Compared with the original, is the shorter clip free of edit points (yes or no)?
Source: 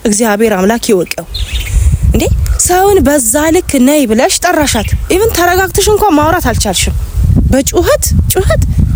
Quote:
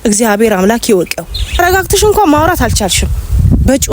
no